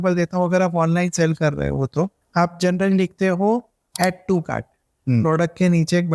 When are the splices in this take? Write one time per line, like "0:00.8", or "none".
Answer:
0:02.2
0:03.8

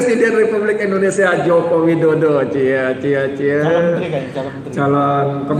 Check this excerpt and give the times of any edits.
none

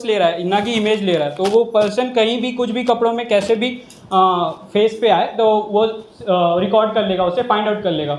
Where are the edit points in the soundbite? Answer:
none

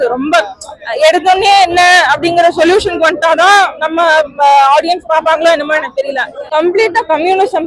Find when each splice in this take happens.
0:06.3

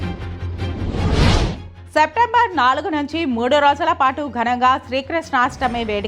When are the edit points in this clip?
0:01.7

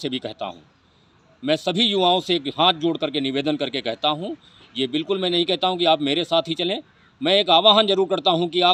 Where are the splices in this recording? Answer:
none

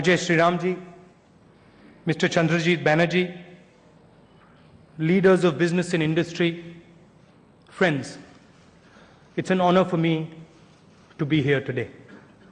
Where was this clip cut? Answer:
0:09.7

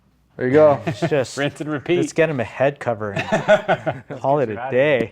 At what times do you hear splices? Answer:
0:04.1

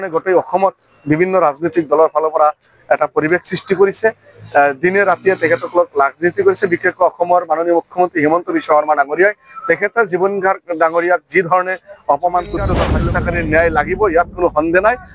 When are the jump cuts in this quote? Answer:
0:12.9

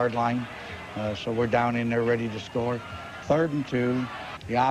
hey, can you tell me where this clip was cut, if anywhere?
0:01.0

